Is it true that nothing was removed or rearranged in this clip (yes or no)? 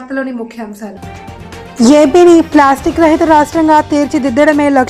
no